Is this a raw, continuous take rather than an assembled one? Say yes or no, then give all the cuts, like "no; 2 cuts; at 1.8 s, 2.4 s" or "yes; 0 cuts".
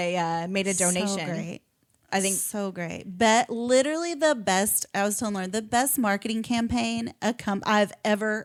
yes; 0 cuts